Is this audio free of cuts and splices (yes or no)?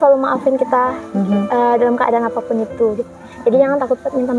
yes